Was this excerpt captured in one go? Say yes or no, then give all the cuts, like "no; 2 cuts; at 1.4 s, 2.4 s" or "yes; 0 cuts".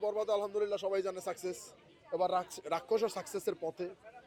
yes; 0 cuts